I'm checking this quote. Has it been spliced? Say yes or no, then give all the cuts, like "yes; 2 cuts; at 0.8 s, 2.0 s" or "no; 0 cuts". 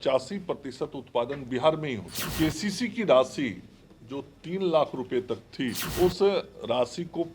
yes; 2 cuts; at 2.2 s, 5.8 s